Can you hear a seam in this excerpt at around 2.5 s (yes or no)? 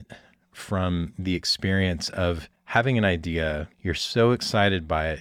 no